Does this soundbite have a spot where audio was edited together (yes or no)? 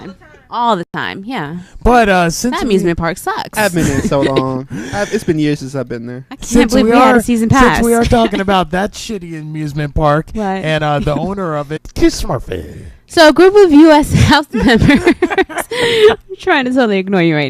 no